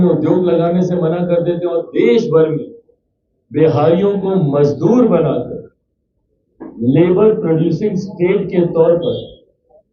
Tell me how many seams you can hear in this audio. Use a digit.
0